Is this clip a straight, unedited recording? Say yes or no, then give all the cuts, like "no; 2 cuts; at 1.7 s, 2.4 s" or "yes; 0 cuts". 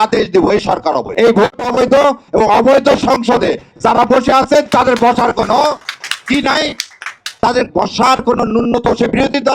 no; 1 cut; at 1.1 s